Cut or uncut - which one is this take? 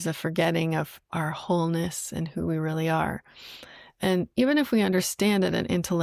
cut